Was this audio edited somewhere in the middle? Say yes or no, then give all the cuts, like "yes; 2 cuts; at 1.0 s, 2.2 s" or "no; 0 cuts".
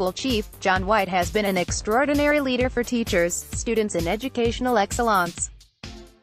no; 0 cuts